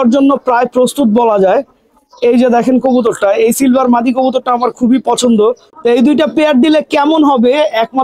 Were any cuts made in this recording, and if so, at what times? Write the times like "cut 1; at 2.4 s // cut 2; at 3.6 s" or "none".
cut 1; at 5.7 s